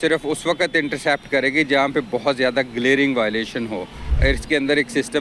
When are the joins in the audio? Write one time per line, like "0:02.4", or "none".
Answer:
0:04.1